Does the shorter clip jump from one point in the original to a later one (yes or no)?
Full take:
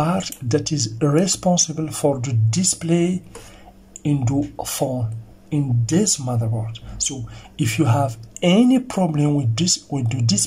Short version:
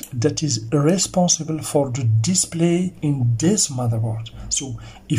yes